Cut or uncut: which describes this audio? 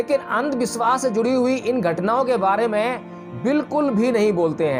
uncut